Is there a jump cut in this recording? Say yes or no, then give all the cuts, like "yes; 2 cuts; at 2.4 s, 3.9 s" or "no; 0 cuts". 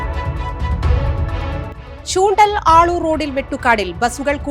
yes; 1 cut; at 1.7 s